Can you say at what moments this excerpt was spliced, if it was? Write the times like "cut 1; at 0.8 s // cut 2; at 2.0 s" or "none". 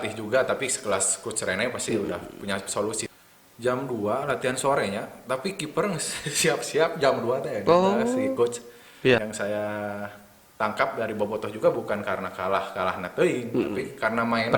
cut 1; at 3.0 s // cut 2; at 9.2 s